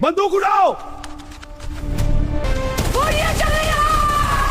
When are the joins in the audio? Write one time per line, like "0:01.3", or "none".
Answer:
0:02.4